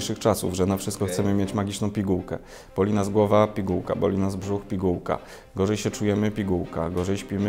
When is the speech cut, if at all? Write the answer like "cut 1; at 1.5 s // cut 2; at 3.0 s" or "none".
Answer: none